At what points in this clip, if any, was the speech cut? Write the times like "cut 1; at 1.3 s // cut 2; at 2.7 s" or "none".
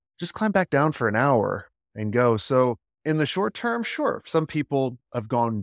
cut 1; at 2.9 s